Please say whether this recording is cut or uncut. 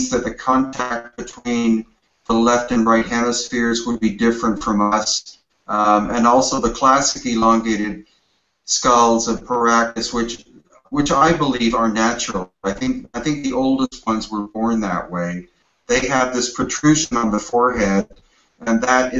cut